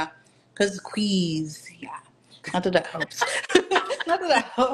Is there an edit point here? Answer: no; 0 cuts

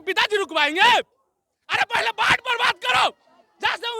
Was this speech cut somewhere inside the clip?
no; 0 cuts

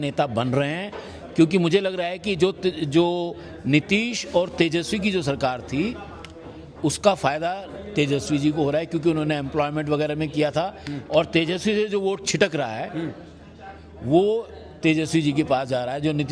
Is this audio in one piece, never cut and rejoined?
yes; 0 cuts

